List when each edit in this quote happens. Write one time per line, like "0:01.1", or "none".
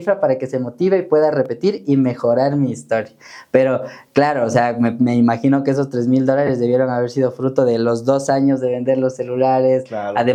none